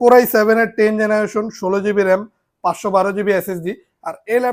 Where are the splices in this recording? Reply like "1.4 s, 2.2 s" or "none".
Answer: none